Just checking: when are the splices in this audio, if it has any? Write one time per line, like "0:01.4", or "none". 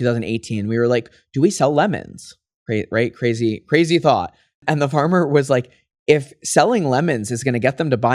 none